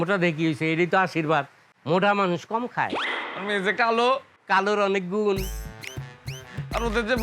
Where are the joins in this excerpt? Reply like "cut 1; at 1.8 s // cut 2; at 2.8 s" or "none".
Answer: none